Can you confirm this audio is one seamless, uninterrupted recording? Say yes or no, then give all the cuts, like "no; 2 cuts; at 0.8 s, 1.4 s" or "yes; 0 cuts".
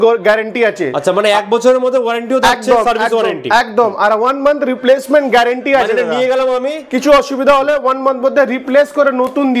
yes; 0 cuts